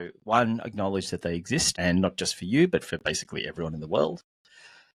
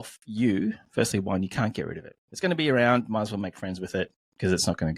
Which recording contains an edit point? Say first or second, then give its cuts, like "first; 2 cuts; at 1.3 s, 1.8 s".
first; 1 cut; at 1.7 s